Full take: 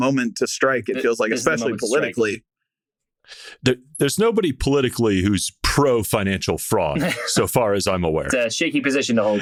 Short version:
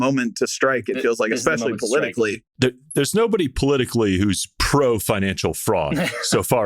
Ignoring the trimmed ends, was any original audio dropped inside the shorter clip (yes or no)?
yes